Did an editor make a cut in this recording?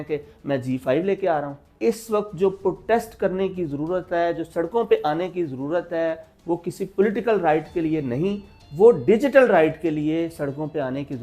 yes; 1 cut; at 1.7 s

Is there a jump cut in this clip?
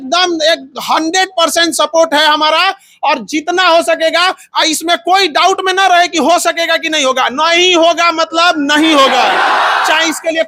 no; 0 cuts

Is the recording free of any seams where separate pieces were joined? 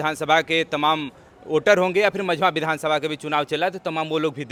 yes; 0 cuts

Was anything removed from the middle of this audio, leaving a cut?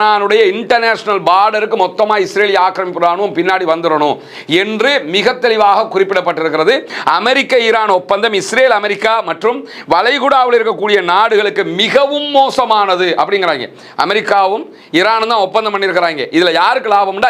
yes; 1 cut; at 6.9 s

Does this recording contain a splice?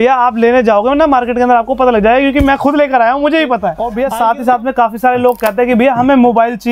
yes; 1 cut; at 3.8 s

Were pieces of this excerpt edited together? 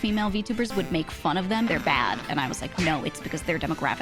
yes; 1 cut; at 1.7 s

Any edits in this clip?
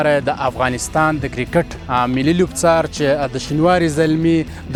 no; 0 cuts

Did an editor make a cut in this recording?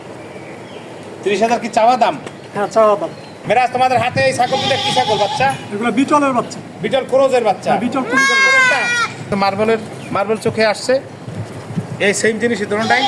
yes; 2 cuts; at 3.3 s, 9.3 s

